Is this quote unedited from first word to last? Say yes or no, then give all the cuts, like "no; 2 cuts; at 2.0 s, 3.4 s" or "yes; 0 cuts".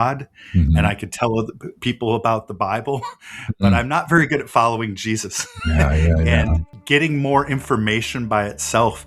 no; 1 cut; at 6.7 s